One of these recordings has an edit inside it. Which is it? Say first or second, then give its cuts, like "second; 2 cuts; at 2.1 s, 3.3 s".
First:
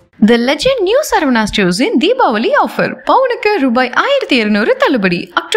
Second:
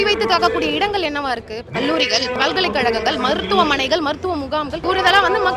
second; 3 cuts; at 1.6 s, 2.3 s, 4.8 s